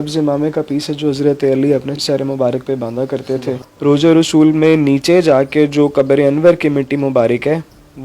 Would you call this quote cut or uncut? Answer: cut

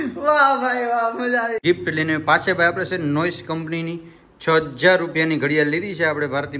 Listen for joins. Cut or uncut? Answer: cut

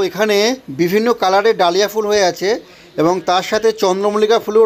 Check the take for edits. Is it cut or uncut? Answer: uncut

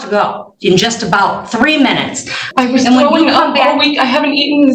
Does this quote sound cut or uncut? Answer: cut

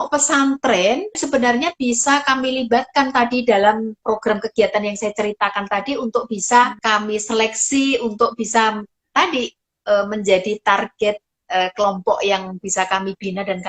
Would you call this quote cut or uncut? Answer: cut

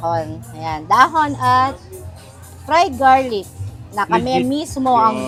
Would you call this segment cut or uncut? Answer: uncut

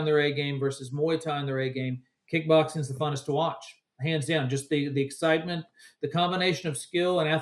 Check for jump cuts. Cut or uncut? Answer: uncut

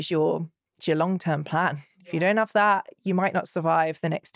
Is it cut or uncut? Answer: uncut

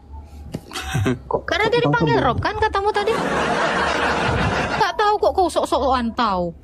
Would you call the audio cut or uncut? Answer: cut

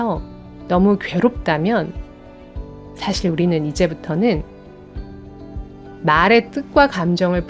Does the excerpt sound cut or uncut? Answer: uncut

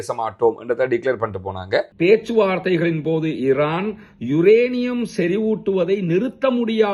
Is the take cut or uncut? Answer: cut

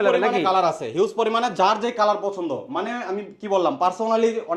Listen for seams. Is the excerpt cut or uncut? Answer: uncut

